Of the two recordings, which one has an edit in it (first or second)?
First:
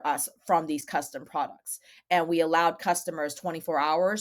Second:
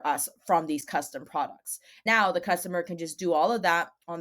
second